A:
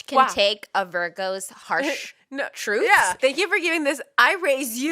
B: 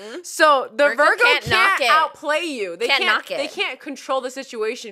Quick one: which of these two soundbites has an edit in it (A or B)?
A